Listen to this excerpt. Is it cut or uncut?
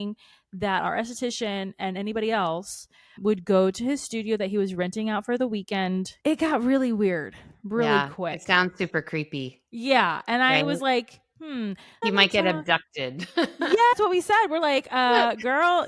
cut